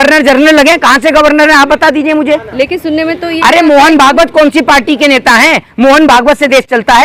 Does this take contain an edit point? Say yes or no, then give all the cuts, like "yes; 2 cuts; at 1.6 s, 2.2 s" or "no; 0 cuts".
no; 0 cuts